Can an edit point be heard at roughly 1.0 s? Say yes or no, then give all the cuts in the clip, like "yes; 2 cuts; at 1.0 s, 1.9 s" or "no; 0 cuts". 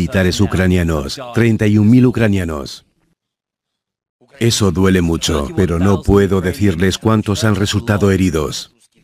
no; 0 cuts